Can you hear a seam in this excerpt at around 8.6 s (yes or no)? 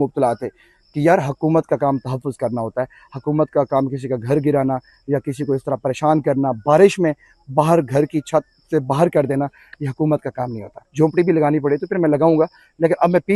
no